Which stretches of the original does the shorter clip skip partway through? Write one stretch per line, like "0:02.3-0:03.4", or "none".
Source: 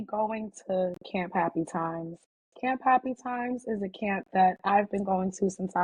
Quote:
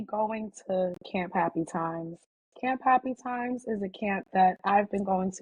none